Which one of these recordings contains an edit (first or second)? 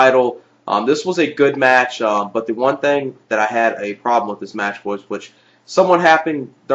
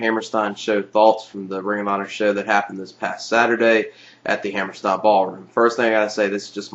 first